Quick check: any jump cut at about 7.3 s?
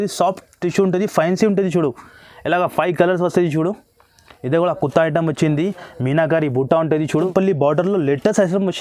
yes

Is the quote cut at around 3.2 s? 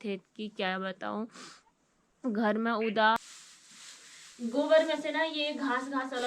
yes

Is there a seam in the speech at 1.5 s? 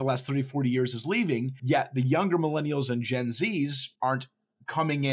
yes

